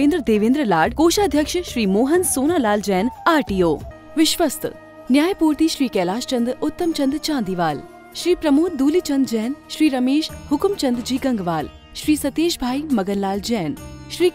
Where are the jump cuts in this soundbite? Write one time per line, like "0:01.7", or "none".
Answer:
0:03.9